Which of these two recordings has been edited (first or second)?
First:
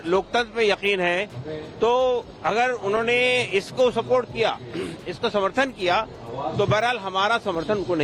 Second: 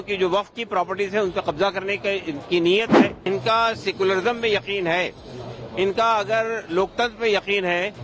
second